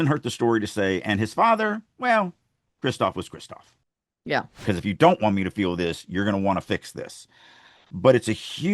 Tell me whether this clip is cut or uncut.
cut